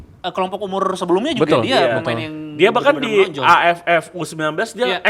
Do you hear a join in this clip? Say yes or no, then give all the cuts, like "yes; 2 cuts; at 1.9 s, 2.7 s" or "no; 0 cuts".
no; 0 cuts